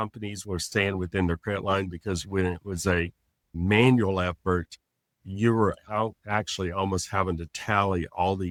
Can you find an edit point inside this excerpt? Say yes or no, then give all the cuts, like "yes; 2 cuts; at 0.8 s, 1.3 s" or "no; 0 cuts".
no; 0 cuts